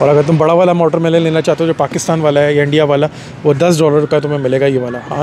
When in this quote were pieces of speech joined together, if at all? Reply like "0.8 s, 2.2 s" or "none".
none